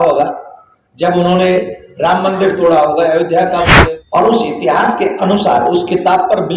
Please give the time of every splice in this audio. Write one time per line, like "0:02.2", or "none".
0:03.8